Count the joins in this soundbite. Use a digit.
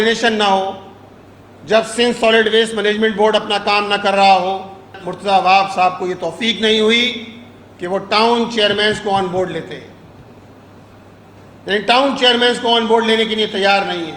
1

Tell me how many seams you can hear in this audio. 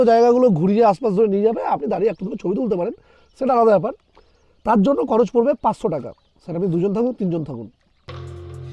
0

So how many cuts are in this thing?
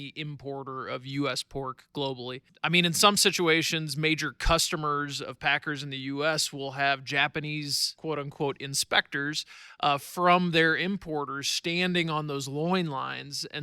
2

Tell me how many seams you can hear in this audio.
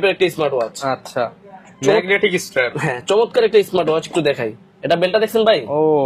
0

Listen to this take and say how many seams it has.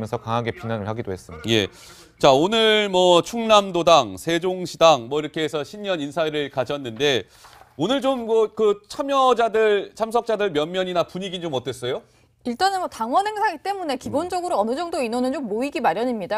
1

